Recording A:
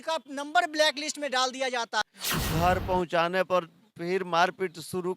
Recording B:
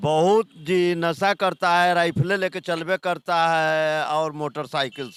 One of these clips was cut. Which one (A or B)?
A